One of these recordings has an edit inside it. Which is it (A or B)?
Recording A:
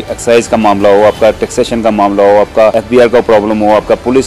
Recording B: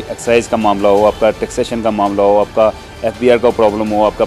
A